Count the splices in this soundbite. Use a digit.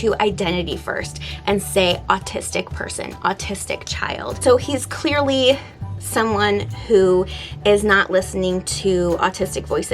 1